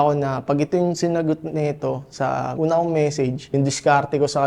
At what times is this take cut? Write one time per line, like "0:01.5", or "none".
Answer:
0:02.5
0:03.5